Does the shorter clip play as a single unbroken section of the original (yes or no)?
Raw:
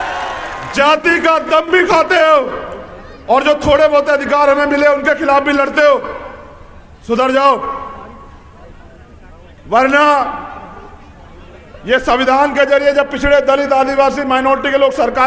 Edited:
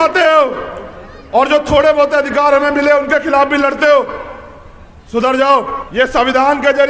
no